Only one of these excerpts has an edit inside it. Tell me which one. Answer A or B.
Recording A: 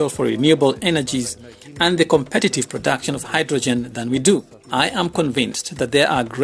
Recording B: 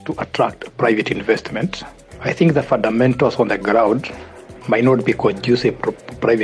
A